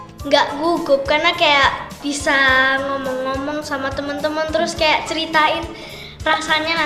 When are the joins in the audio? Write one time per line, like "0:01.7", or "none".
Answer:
none